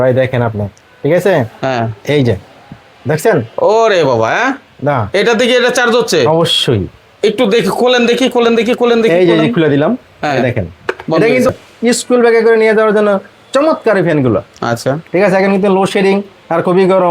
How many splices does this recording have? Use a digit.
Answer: 1